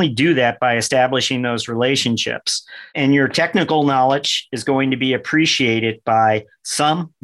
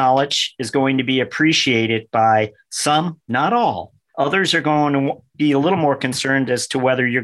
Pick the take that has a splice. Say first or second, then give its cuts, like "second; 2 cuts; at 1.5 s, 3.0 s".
first; 1 cut; at 2.9 s